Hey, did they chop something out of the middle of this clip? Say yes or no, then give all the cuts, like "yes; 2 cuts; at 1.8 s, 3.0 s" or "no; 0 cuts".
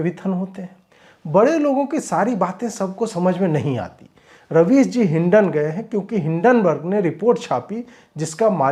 no; 0 cuts